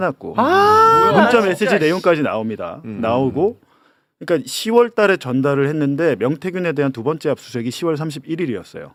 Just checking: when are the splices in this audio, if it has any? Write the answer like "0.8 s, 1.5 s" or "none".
none